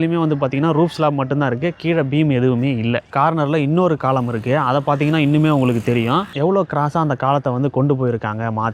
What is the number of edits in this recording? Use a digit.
1